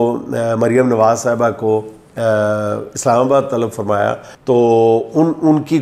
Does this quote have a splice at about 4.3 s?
yes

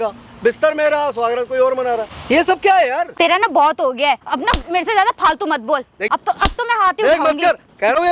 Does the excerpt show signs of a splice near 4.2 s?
yes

